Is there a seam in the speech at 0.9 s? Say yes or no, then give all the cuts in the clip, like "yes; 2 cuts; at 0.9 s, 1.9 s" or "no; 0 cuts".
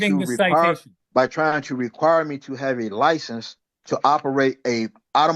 yes; 1 cut; at 0.9 s